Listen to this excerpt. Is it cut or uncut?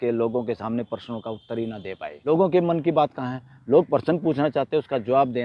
cut